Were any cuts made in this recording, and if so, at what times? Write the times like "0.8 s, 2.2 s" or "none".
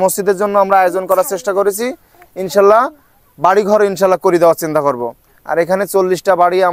none

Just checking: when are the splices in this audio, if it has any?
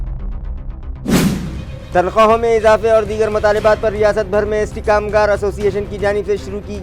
1.3 s

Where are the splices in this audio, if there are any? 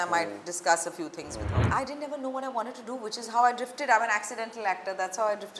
1.6 s

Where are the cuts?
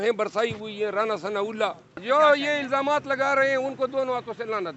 1.9 s

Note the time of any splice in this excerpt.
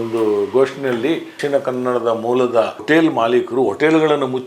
1.3 s, 2.8 s

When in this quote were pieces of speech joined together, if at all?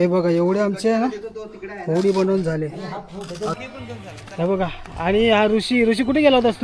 3.5 s

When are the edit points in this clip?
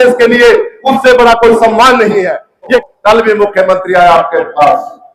2.8 s

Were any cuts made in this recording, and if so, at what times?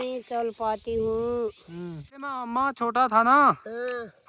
2.4 s

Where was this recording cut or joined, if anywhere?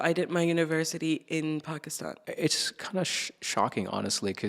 2.2 s

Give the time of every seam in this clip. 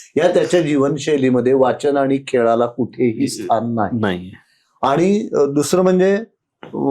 none

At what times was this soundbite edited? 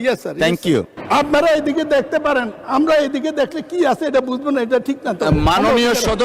1.0 s

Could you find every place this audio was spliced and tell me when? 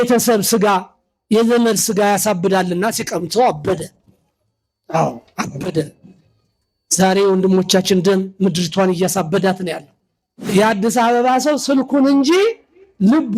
10.5 s

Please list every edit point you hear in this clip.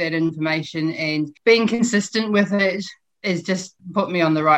1.3 s, 3.3 s

